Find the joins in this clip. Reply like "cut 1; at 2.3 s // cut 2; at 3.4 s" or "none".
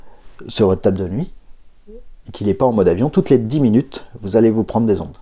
none

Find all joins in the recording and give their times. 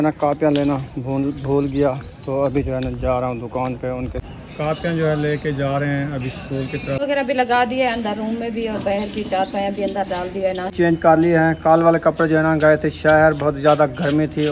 cut 1; at 4.2 s // cut 2; at 7.0 s // cut 3; at 10.7 s

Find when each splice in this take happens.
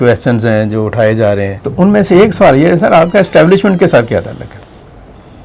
cut 1; at 1.6 s

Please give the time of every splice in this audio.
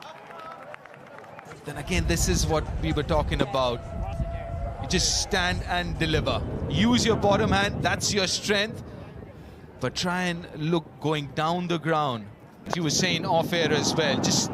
cut 1; at 12.7 s

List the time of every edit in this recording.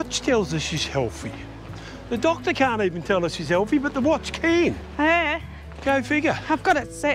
none

